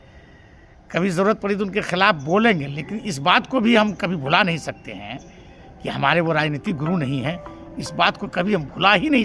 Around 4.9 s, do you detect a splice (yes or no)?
no